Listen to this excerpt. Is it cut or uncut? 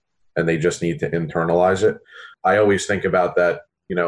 cut